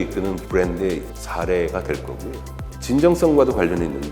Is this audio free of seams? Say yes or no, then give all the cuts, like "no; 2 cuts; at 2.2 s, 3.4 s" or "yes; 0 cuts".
no; 1 cut; at 2.6 s